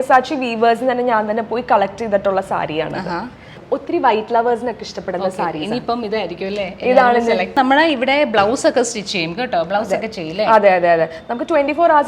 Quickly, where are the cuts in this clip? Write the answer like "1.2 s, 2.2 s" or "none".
3.6 s, 7.5 s